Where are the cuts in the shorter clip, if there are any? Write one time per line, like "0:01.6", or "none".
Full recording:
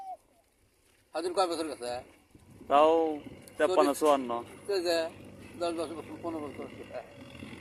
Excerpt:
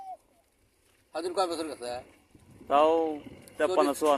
none